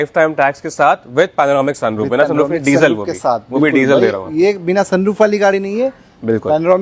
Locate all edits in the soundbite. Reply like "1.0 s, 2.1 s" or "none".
none